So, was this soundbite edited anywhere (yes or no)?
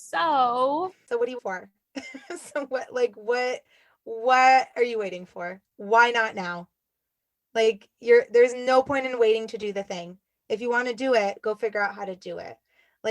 yes